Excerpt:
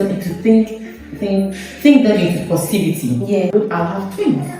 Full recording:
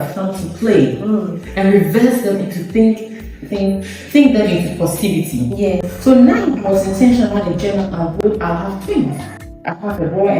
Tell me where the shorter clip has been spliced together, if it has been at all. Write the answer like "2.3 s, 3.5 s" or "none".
3.5 s